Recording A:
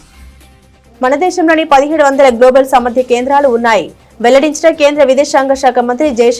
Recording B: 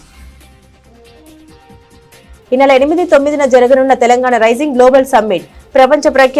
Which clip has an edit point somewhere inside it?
A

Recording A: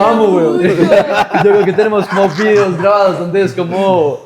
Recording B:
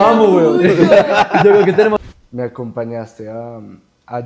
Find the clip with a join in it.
B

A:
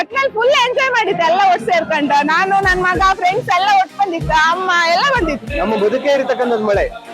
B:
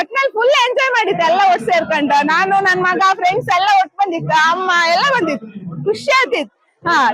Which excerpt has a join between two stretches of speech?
A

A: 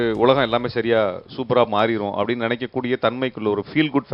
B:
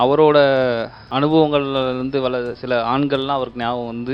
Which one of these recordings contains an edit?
B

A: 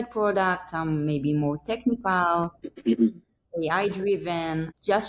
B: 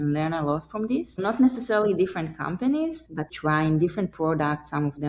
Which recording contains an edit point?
B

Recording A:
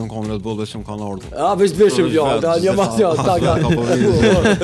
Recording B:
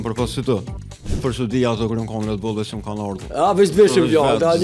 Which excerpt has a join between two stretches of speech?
B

